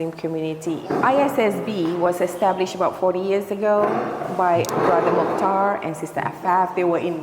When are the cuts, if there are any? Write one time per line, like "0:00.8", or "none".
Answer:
none